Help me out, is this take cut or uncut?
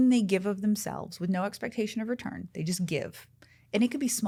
uncut